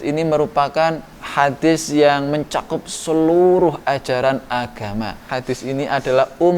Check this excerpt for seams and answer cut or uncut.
cut